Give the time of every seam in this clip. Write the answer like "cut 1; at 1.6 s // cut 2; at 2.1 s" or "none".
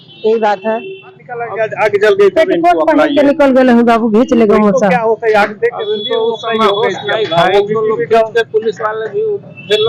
cut 1; at 1.1 s